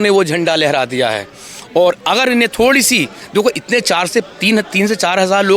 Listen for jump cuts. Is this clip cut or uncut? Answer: uncut